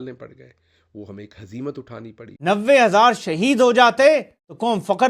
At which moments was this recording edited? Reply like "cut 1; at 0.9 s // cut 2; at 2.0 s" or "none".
cut 1; at 2.3 s